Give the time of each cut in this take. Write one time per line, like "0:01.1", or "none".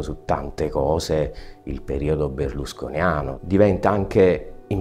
0:03.4